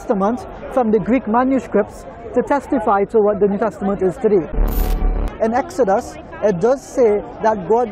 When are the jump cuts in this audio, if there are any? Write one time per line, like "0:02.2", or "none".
0:05.1